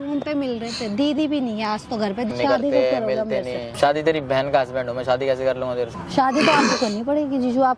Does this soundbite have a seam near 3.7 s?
yes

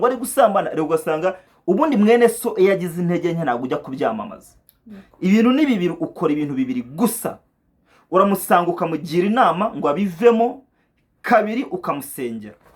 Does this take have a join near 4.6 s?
no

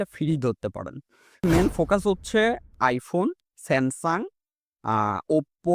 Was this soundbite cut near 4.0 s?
no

